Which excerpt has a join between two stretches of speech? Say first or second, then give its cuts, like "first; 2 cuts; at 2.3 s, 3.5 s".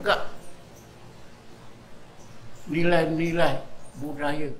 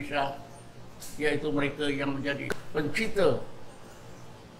second; 1 cut; at 2.5 s